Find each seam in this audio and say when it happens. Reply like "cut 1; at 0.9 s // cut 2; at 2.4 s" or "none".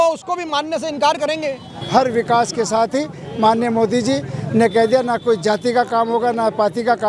cut 1; at 1.7 s